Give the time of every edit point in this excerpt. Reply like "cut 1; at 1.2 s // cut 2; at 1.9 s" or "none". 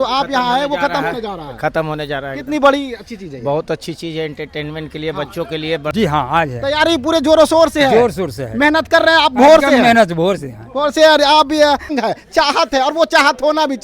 cut 1; at 5.9 s // cut 2; at 11.9 s